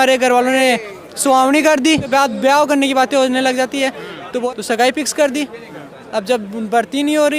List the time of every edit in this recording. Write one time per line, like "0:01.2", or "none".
0:02.1
0:04.4